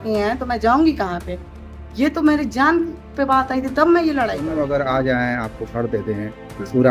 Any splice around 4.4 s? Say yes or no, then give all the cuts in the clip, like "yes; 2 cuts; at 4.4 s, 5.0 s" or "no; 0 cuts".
yes; 1 cut; at 4.4 s